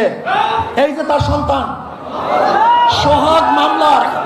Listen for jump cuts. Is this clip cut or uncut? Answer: uncut